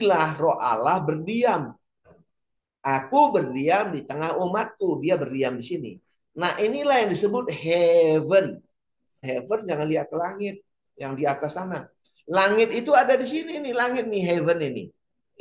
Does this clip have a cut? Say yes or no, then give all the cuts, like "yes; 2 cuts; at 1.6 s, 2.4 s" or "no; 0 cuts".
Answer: yes; 1 cut; at 9.2 s